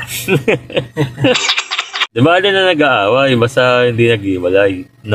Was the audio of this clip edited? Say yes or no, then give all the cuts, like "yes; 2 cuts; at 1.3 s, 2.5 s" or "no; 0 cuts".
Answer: no; 0 cuts